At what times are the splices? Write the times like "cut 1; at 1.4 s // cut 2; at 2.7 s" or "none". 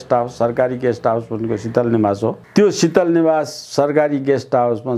cut 1; at 2.4 s